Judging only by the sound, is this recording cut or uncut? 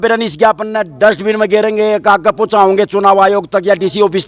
uncut